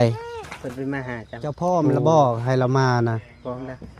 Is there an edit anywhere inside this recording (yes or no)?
yes